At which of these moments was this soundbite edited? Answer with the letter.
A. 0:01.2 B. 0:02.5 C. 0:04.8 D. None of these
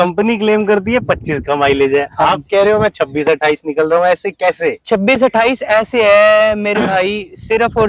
D